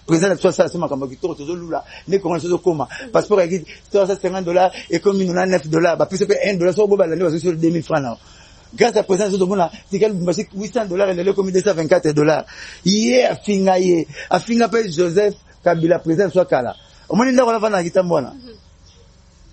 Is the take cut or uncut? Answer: uncut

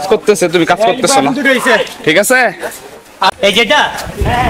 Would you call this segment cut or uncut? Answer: cut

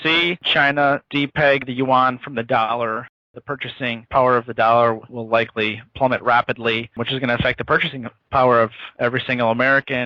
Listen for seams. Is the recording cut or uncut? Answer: uncut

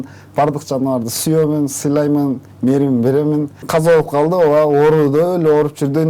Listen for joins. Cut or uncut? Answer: cut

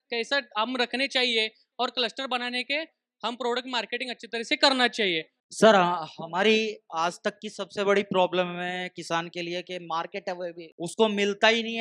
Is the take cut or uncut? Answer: cut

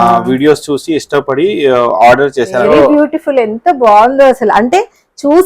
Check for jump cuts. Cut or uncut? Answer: cut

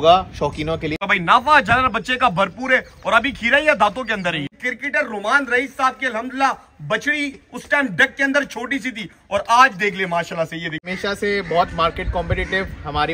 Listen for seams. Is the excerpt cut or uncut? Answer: cut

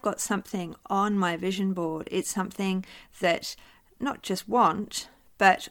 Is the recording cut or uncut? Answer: uncut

